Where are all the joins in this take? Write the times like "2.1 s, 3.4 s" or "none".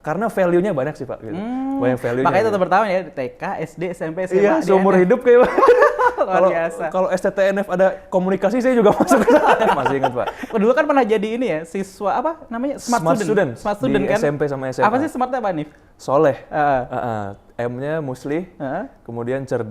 10.0 s